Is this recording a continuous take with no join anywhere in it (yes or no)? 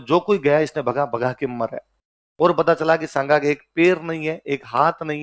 yes